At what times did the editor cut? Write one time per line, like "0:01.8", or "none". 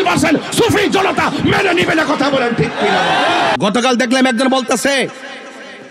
0:03.6